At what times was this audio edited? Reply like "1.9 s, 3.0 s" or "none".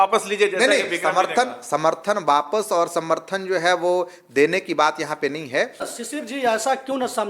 5.9 s